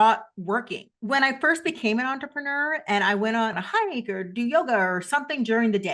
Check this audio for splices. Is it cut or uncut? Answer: cut